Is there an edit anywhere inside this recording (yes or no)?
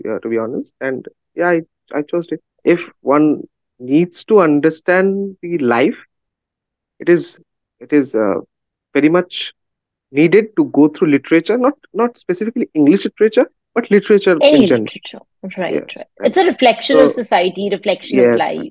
yes